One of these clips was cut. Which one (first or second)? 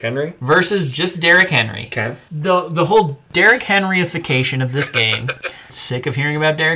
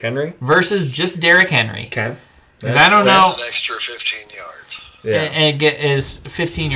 first